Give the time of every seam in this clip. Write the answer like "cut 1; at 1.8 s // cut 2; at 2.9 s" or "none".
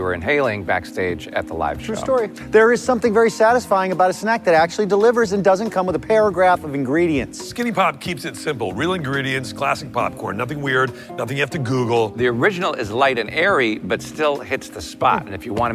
cut 1; at 2.4 s // cut 2; at 7.4 s // cut 3; at 12.2 s